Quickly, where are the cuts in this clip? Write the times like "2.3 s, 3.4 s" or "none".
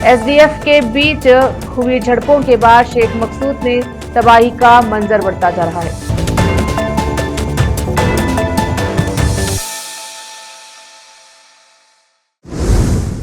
12.0 s